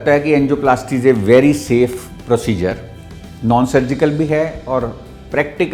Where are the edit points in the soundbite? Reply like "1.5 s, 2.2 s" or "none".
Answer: none